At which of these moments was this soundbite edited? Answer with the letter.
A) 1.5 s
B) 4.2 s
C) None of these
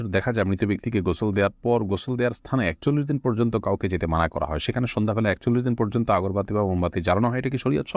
C